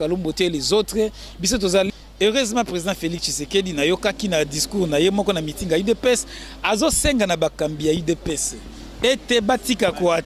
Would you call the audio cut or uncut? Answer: cut